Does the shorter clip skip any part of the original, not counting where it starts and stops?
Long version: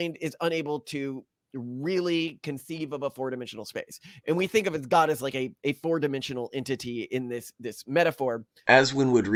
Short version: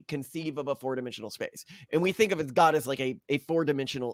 no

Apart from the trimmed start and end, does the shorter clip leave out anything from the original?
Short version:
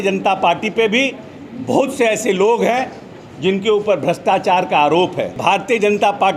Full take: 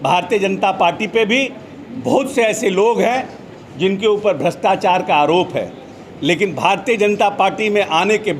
yes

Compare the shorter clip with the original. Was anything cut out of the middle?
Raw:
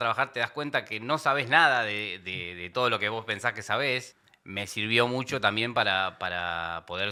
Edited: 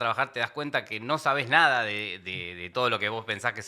no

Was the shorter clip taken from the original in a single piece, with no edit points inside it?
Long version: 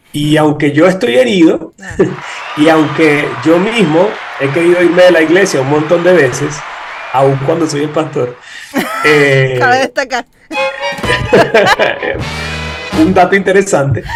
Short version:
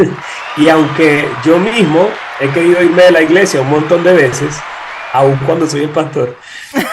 yes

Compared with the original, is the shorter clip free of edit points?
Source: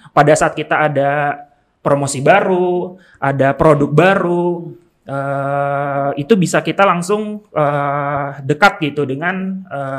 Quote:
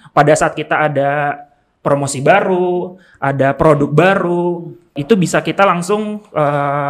no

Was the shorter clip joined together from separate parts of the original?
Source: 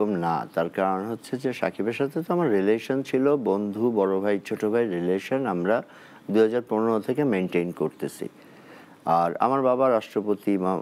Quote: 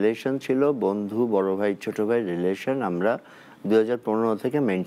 no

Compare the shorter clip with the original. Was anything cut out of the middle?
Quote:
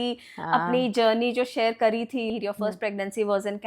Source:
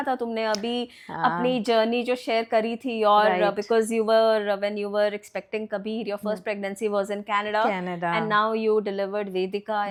yes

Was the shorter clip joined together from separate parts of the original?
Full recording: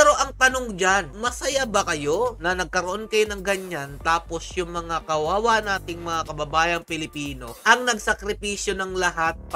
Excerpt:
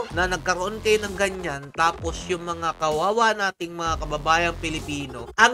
no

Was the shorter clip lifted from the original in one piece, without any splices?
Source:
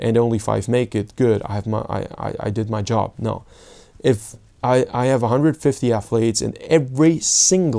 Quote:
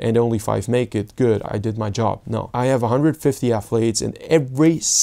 no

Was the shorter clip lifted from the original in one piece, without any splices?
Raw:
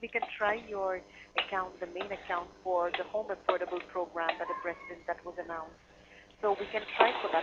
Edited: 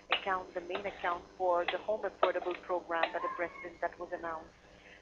yes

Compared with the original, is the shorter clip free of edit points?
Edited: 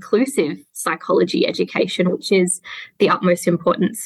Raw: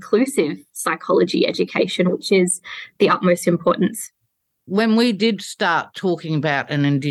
yes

